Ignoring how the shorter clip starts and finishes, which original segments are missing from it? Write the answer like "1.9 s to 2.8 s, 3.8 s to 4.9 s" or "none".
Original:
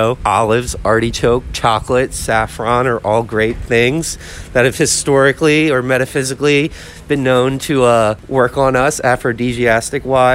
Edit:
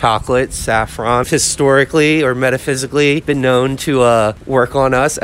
2.9 s to 4.7 s, 6.7 s to 7.0 s